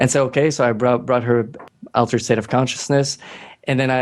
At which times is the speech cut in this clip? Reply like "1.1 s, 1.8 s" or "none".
1.6 s